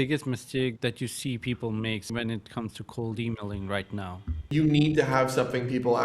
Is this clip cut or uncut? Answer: cut